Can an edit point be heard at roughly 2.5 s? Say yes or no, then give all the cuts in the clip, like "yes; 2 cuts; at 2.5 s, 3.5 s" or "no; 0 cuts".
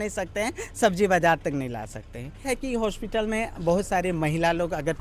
yes; 1 cut; at 2.5 s